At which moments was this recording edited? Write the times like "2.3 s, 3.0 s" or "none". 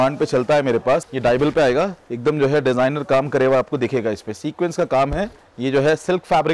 1.1 s, 5.4 s